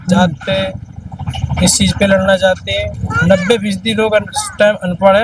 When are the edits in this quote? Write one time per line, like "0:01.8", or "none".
0:02.9